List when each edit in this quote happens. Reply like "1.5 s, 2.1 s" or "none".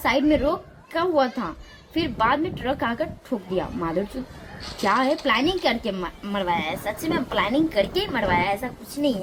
none